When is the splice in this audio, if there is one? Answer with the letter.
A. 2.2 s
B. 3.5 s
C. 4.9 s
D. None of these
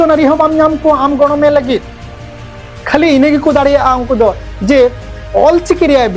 D